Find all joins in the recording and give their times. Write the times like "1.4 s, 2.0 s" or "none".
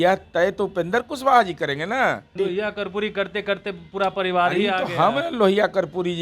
2.3 s